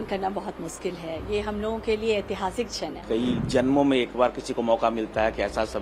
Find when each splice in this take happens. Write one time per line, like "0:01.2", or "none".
0:03.0